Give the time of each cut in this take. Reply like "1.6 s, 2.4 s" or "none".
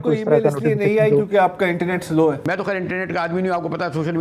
2.4 s